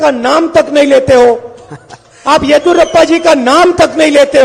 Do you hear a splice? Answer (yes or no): no